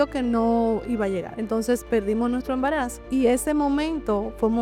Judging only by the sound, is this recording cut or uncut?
cut